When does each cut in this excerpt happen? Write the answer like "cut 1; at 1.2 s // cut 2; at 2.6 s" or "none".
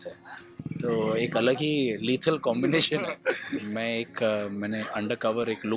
cut 1; at 3.5 s